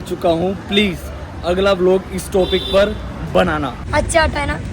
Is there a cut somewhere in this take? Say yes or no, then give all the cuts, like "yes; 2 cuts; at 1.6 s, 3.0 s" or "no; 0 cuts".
yes; 1 cut; at 3.7 s